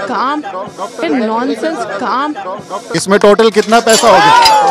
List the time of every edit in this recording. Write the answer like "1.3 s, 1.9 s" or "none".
1.0 s, 2.9 s